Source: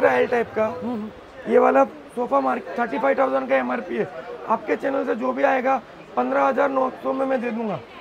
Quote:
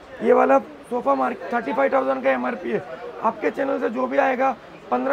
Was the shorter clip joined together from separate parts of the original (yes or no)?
no